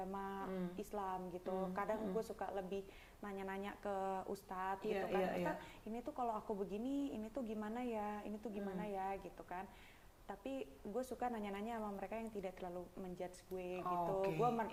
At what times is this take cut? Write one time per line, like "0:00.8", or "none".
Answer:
none